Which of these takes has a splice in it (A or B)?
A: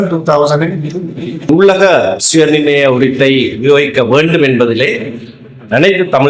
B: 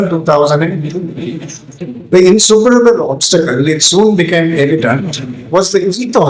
A